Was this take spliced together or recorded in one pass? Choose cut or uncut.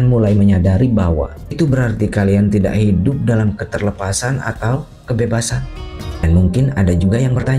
cut